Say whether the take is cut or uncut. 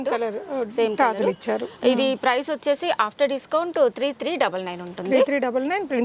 uncut